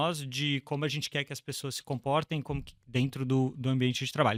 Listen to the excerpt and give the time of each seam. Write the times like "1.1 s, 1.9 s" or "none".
none